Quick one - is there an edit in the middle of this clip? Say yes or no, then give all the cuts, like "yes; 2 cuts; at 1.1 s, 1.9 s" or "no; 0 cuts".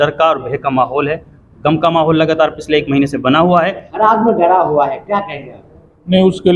yes; 1 cut; at 3.8 s